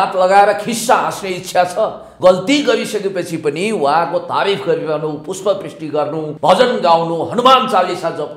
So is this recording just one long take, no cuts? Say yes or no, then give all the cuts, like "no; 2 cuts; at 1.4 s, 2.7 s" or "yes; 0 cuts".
no; 2 cuts; at 2.0 s, 6.3 s